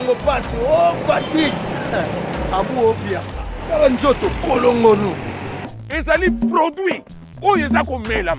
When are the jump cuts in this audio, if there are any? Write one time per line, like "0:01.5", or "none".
none